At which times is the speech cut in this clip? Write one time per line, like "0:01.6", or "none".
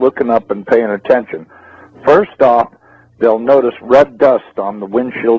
0:03.8